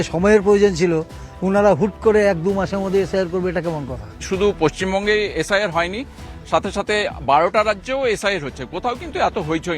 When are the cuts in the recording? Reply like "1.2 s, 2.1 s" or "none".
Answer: none

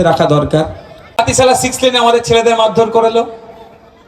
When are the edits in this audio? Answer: 1.2 s

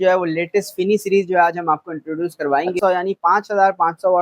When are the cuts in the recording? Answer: 2.8 s

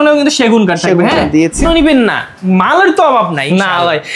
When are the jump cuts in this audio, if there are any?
1.6 s

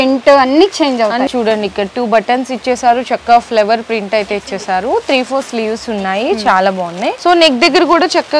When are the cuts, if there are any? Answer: 1.3 s, 7.2 s

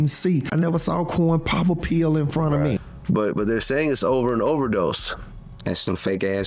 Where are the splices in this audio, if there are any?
2.9 s

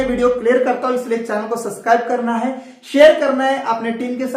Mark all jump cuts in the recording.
none

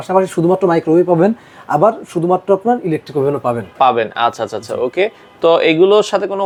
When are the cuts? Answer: none

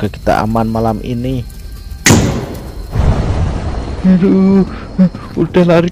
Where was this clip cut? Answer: 2.9 s

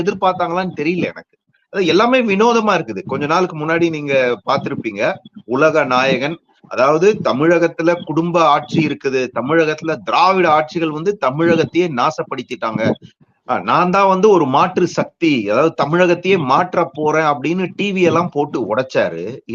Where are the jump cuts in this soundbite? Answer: 1.6 s

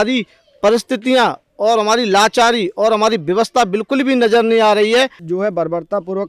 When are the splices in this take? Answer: 5.2 s

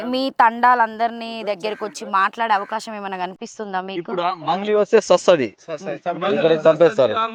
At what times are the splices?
none

